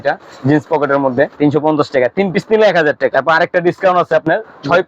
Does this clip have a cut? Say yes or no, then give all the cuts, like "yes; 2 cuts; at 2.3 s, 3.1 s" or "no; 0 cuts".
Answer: yes; 2 cuts; at 1.3 s, 3.1 s